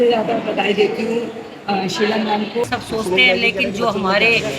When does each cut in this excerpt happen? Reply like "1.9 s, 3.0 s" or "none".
2.6 s